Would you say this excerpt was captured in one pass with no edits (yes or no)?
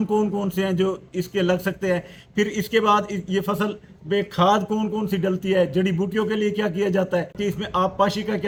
yes